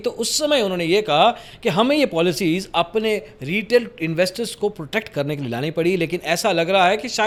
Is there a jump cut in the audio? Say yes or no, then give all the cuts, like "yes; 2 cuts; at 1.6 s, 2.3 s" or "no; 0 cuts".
no; 0 cuts